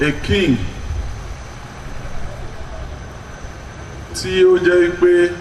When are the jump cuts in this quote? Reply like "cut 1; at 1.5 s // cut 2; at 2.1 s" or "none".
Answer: none